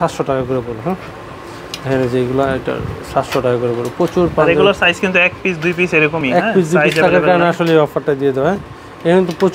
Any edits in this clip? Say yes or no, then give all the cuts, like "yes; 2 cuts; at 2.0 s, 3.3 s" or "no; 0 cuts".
no; 0 cuts